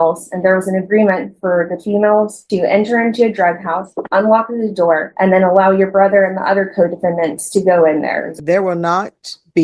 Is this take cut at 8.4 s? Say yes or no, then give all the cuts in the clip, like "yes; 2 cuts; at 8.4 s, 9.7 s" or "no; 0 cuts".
yes; 1 cut; at 8.4 s